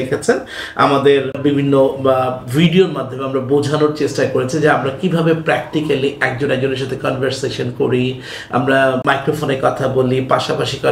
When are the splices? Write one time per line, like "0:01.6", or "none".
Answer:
0:01.3
0:09.0